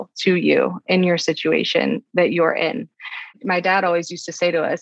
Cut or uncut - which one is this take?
uncut